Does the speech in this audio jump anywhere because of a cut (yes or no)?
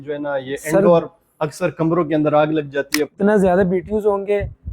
yes